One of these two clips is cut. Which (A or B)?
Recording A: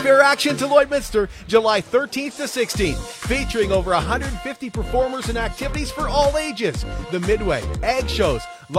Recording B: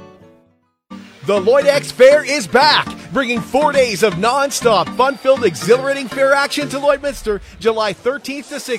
B